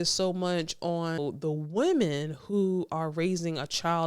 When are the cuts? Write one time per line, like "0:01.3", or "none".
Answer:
0:01.2